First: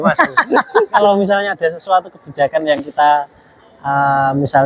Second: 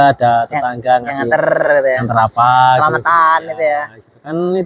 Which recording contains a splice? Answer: first; 1 cut; at 1.0 s

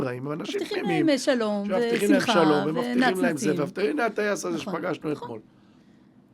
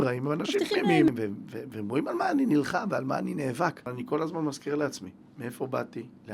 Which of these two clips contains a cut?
second; 2 cuts; at 1.1 s, 3.9 s

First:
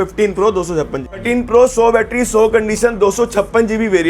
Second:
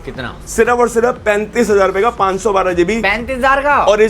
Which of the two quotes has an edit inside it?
first; 1 cut; at 1.2 s

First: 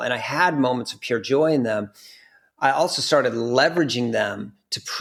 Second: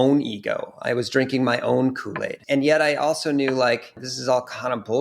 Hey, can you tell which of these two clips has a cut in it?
second; 2 cuts; at 2.4 s, 4.1 s

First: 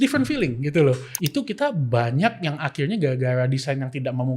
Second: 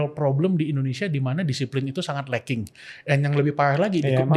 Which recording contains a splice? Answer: first; 1 cut; at 1.1 s

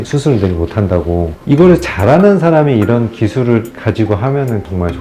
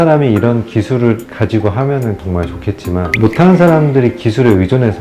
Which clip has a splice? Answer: first; 1 cut; at 1.3 s

